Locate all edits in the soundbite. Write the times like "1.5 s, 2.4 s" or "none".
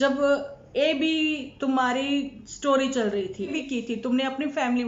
3.5 s